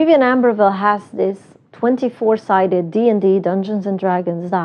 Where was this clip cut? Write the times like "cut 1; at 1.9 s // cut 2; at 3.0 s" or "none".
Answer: none